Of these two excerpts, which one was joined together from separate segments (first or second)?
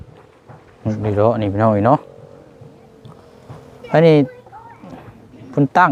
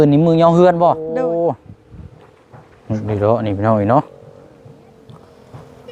second